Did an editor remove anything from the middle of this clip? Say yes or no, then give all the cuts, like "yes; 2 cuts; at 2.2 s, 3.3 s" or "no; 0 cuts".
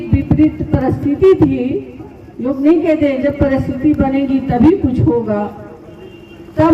no; 0 cuts